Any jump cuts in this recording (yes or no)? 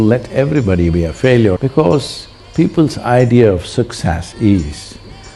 yes